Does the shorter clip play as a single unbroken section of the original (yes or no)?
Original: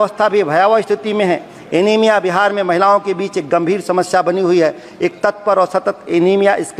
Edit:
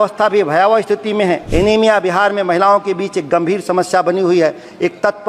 no